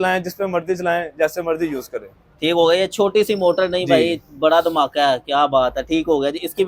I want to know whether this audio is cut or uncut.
uncut